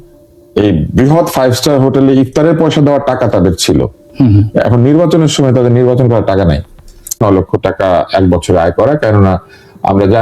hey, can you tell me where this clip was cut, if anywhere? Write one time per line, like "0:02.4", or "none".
0:07.2